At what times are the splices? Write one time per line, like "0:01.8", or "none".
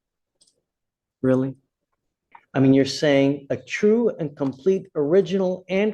0:02.3